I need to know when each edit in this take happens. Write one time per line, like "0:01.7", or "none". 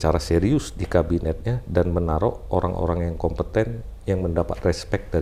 none